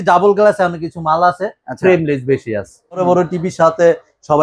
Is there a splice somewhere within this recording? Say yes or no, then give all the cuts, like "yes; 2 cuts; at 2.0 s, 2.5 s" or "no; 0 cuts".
yes; 1 cut; at 3.0 s